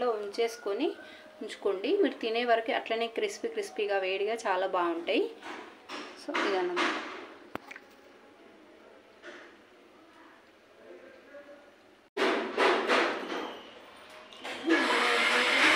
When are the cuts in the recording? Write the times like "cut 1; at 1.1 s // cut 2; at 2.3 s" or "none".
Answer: cut 1; at 12.1 s